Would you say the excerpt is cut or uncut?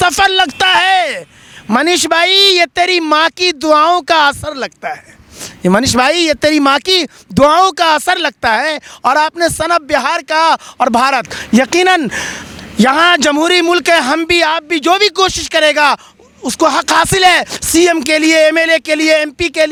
uncut